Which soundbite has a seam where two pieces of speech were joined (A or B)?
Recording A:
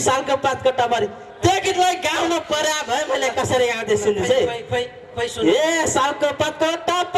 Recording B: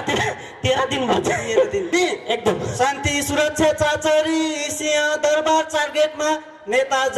B